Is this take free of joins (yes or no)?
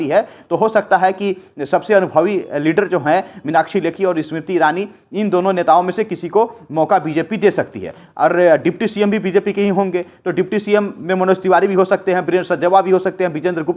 yes